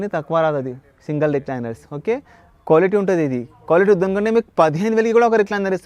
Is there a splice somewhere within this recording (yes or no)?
no